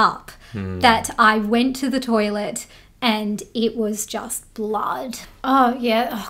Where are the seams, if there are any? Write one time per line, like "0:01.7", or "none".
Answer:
0:05.2